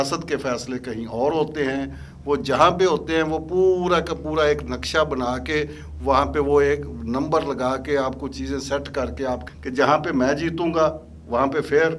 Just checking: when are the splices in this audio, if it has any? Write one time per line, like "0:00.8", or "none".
0:09.5